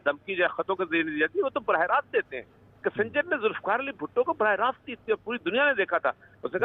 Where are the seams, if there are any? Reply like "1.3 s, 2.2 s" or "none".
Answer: none